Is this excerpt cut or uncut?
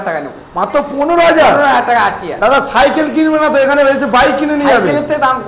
uncut